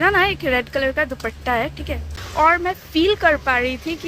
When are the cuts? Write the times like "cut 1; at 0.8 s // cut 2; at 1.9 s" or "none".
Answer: cut 1; at 2.2 s